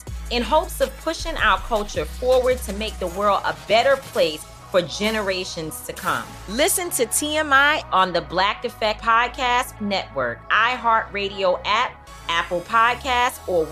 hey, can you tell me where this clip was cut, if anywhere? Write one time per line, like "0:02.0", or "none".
none